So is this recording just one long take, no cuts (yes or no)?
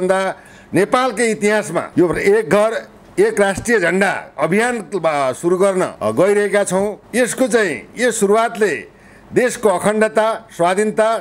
no